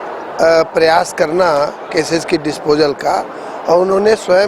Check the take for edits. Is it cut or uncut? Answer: uncut